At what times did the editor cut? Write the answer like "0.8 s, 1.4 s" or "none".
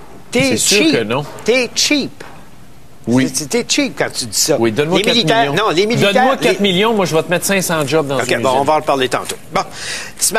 9.5 s

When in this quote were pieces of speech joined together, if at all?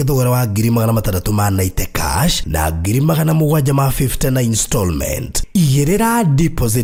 none

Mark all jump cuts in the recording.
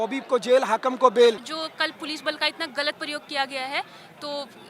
1.5 s

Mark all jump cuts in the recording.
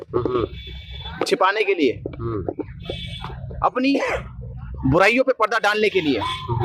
none

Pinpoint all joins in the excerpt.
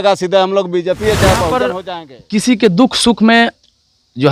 1.8 s

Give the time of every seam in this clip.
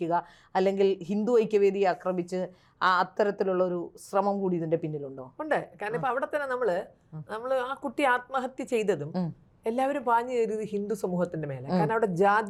none

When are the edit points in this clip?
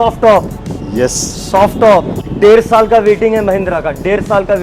2.2 s

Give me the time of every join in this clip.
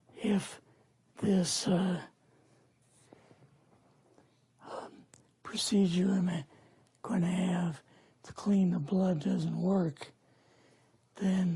8.8 s

